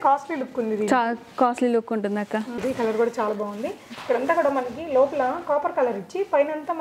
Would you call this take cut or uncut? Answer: cut